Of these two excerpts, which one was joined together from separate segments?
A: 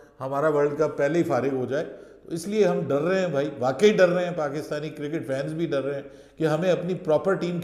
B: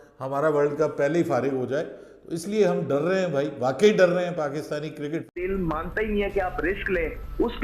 B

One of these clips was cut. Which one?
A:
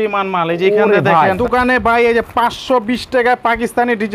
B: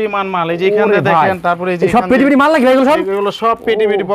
A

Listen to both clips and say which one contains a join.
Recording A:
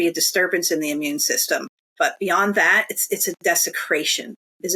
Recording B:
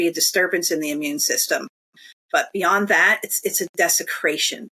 A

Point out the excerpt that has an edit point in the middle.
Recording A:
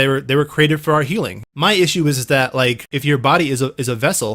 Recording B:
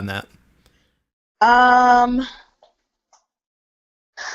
A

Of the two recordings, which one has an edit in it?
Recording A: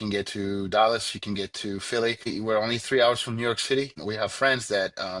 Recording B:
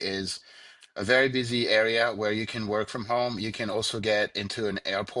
A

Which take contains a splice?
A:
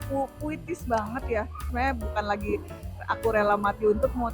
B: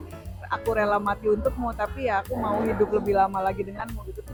A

